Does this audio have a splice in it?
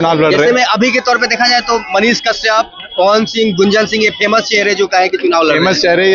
no; 0 cuts

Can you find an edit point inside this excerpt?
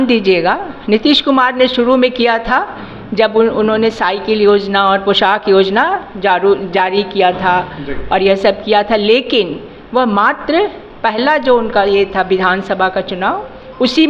no; 0 cuts

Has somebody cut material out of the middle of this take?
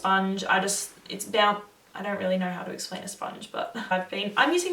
yes; 1 cut; at 3.8 s

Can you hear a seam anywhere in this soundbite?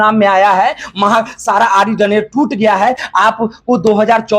yes; 1 cut; at 3.1 s

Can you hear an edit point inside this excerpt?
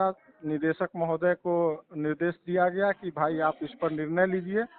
no; 0 cuts

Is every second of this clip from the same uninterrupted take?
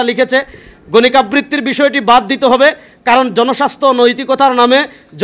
yes; 0 cuts

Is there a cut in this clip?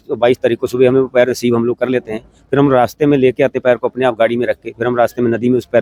no; 0 cuts

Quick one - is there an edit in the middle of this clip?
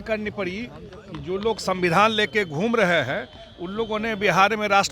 no; 0 cuts

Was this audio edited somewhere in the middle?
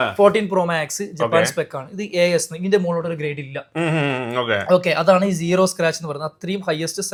no; 0 cuts

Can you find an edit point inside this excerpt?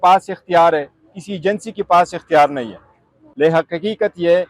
yes; 1 cut; at 3.2 s

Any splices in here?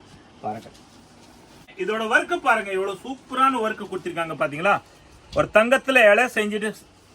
yes; 1 cut; at 1.7 s

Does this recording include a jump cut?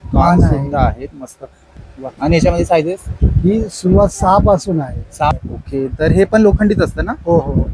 yes; 2 cuts; at 1.6 s, 5.3 s

